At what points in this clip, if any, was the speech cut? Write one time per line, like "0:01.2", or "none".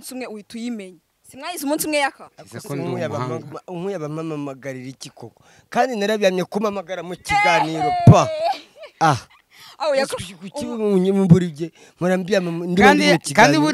none